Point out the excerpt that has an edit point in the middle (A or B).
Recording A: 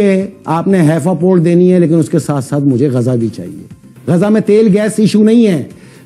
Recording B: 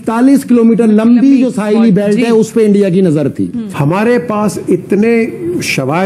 B